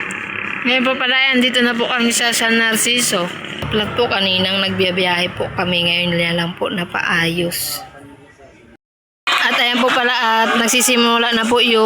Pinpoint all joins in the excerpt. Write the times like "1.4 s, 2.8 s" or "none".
3.7 s, 8.9 s